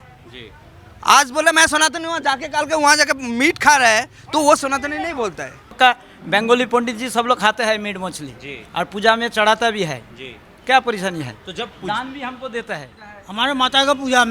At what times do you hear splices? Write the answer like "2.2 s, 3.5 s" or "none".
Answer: 5.8 s, 13.0 s